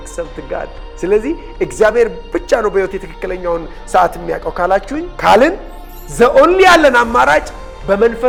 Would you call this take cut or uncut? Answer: uncut